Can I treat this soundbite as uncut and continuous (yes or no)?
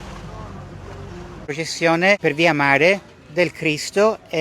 no